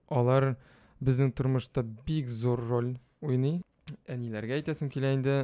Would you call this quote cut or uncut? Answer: cut